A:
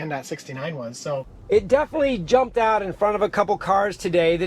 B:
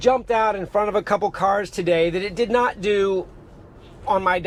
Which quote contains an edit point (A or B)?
A